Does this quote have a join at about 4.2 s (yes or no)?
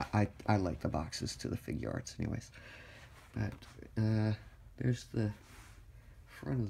yes